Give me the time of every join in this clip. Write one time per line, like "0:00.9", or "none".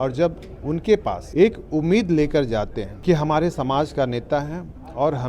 0:01.2
0:02.9